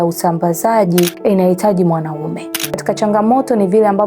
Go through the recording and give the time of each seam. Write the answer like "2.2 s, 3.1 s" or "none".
1.1 s, 2.8 s